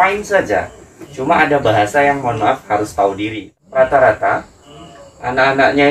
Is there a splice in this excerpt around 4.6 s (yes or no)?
no